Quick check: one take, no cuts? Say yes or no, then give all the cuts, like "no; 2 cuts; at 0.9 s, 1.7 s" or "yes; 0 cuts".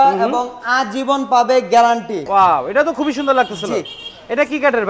no; 1 cut; at 2.3 s